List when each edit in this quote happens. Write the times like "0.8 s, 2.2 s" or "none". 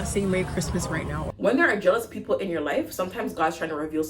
1.2 s